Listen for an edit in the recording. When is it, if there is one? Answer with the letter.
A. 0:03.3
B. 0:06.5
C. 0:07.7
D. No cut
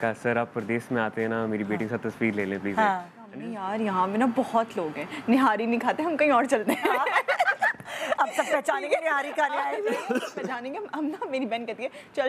A